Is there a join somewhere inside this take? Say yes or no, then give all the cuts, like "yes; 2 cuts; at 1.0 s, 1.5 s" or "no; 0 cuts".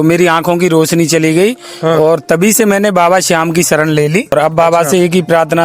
yes; 1 cut; at 4.3 s